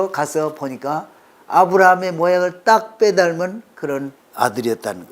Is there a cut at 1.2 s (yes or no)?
no